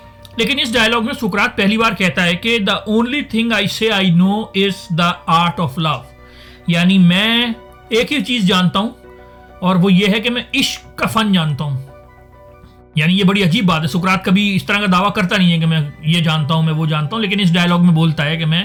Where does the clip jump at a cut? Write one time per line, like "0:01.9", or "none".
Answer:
none